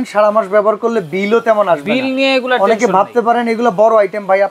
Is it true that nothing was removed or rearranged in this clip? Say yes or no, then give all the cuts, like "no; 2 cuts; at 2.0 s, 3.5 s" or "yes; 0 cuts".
yes; 0 cuts